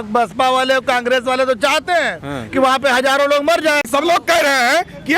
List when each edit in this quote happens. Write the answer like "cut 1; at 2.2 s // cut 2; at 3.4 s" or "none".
cut 1; at 3.9 s